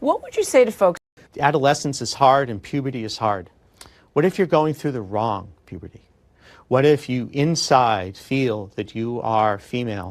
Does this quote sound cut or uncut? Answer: cut